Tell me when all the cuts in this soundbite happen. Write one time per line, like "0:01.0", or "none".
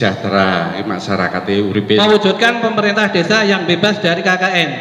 0:02.0